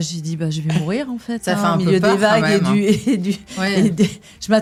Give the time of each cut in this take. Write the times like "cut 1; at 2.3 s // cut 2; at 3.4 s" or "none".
none

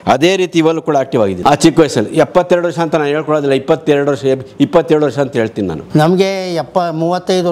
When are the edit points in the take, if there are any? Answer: cut 1; at 1.4 s // cut 2; at 5.8 s

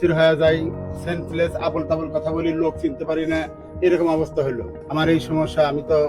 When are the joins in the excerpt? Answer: cut 1; at 4.7 s

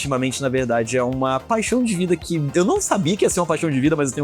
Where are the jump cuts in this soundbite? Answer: none

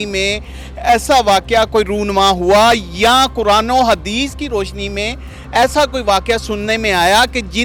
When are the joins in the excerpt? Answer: none

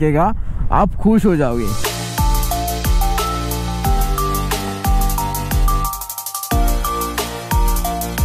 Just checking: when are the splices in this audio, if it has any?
none

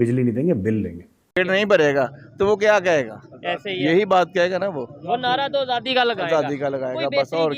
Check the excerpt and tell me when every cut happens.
cut 1; at 1.4 s

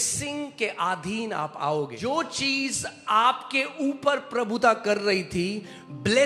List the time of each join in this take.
cut 1; at 1.9 s

